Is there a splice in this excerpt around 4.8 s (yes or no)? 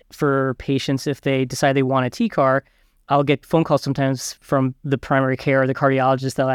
yes